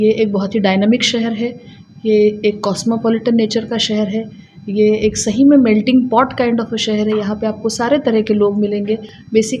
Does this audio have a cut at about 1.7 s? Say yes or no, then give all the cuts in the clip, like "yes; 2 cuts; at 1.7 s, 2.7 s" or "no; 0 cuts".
no; 0 cuts